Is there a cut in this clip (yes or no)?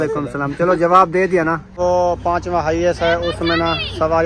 yes